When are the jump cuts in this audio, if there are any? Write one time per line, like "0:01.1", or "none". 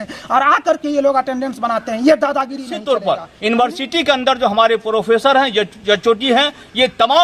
0:02.7

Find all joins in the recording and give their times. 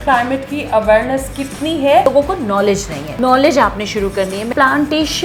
0:02.1
0:03.0
0:04.5

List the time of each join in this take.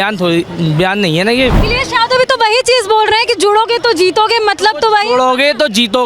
0:01.6

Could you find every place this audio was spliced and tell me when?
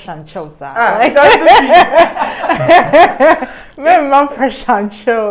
none

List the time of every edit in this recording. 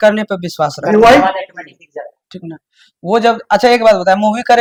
none

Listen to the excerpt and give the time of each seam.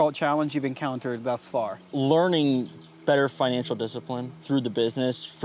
0:01.9
0:04.3

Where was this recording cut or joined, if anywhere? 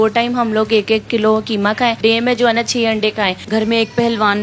0:02.0
0:03.4

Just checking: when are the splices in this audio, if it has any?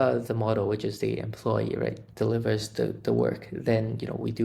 none

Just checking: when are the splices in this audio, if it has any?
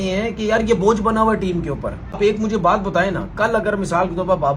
0:02.2

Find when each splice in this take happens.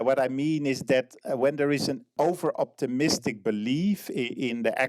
0:02.1

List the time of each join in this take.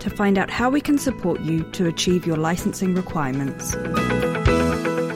0:03.7

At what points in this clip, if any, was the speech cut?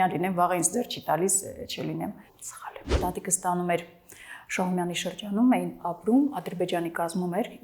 0:03.0

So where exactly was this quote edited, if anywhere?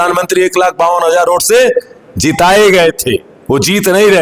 none

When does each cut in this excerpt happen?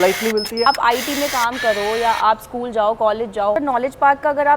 0:00.7
0:03.6

